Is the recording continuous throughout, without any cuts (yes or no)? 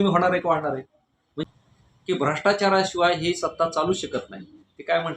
no